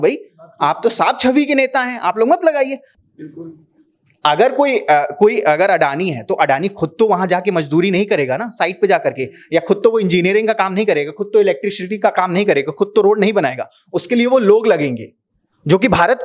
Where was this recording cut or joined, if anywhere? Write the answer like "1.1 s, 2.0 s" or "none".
2.9 s